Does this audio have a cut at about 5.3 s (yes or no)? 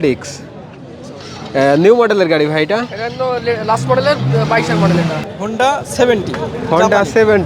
yes